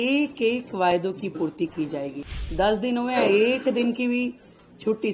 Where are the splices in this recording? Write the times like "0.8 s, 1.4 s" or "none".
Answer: 2.1 s